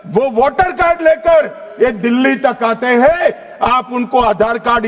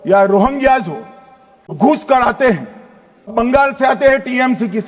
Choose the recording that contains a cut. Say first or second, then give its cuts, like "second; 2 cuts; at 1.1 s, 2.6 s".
second; 2 cuts; at 1.8 s, 3.3 s